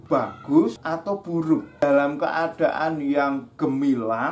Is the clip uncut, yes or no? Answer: no